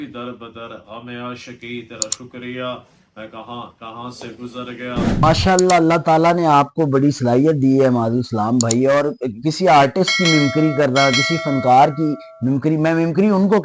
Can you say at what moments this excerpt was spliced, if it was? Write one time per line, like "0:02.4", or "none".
0:05.2